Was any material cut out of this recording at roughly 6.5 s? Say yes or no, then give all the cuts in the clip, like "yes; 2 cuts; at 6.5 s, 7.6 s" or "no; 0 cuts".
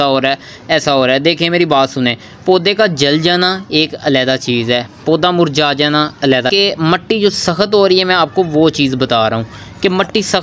yes; 1 cut; at 6.5 s